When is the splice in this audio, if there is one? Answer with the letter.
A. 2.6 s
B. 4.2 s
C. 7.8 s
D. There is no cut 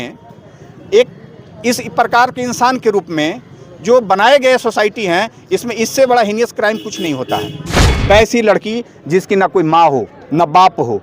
C